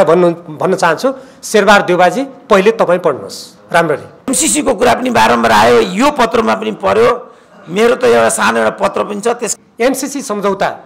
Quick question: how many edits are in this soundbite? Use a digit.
2